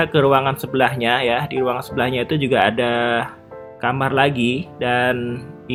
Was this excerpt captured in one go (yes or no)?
yes